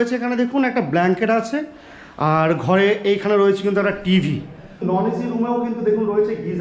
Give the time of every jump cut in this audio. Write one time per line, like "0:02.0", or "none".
0:04.8